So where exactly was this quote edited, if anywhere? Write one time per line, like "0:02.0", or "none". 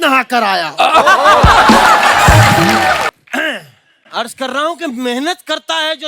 0:03.1